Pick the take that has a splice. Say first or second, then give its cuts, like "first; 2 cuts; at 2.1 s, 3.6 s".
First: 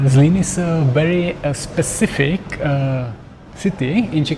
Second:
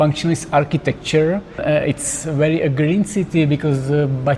second; 1 cut; at 1.6 s